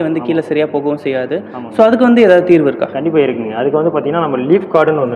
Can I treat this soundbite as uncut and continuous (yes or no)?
yes